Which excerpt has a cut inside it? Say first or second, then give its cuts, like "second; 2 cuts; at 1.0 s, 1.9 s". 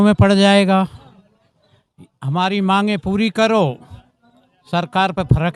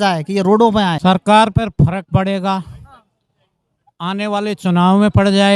second; 1 cut; at 1.0 s